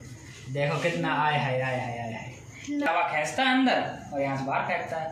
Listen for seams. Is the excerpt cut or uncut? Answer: cut